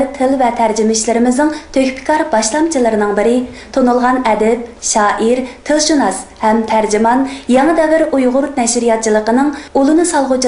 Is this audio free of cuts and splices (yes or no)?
yes